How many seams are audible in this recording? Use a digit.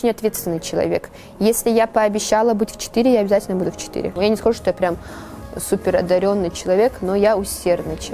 1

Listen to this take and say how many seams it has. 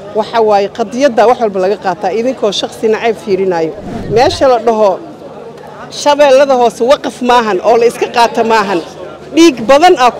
1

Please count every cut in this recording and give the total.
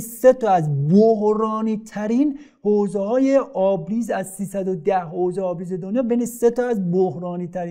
0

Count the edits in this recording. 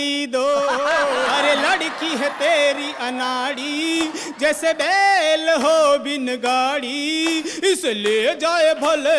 1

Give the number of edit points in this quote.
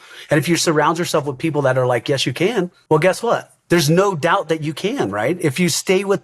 2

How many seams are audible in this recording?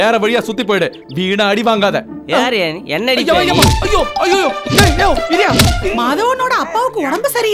1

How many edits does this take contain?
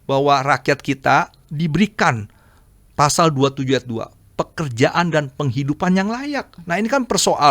1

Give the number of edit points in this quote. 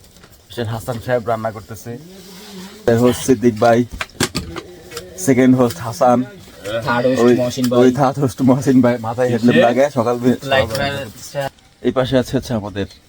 2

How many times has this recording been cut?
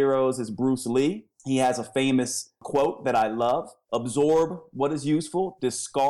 1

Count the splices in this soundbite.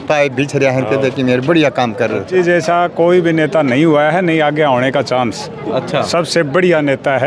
1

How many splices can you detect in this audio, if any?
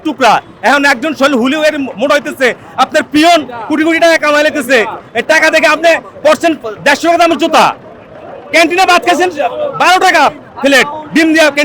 0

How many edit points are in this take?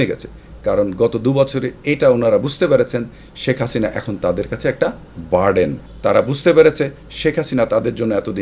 1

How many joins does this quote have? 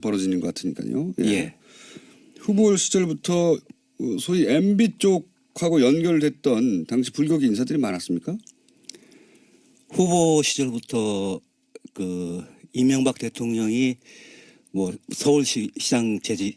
1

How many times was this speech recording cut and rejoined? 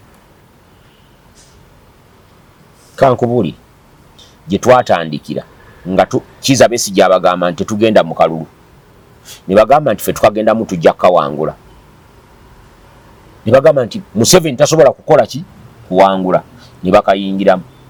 0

